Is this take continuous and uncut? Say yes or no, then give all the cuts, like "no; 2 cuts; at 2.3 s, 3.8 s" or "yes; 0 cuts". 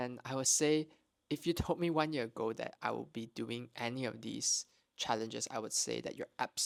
yes; 0 cuts